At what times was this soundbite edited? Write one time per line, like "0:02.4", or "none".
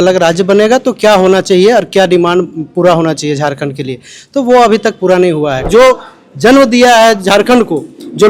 0:05.6